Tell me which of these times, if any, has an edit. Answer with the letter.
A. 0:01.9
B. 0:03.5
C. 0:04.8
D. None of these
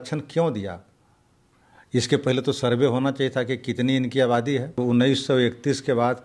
C